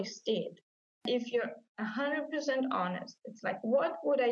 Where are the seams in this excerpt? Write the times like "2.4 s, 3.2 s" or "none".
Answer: 1.0 s